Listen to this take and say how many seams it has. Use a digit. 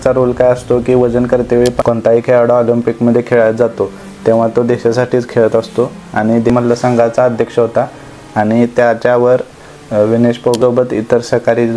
3